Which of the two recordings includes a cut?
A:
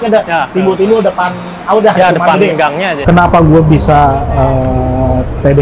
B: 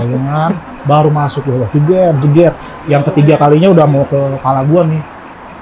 A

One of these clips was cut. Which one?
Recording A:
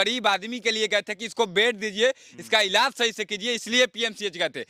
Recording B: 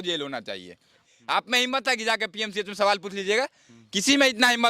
B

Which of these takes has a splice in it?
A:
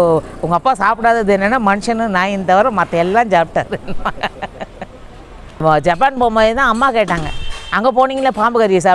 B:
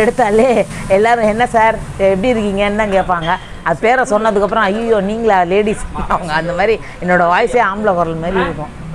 A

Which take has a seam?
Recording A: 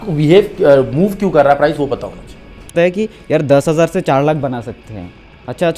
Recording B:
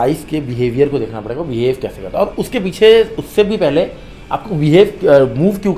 A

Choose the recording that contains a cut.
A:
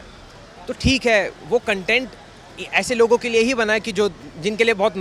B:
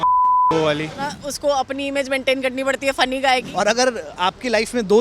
B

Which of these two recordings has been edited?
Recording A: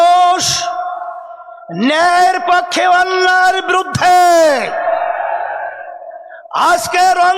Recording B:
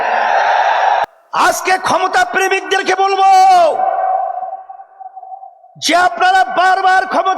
B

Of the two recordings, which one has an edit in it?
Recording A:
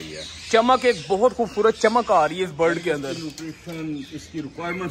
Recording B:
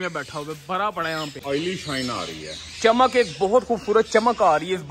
B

